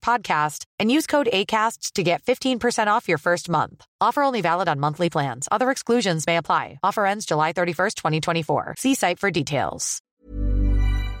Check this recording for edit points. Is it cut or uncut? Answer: cut